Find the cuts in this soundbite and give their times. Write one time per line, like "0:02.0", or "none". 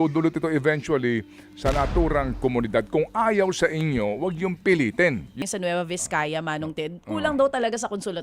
0:05.4